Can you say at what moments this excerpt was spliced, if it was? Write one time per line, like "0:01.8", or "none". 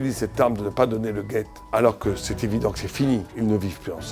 0:01.6
0:03.3